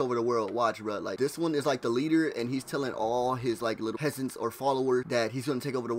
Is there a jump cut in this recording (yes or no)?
yes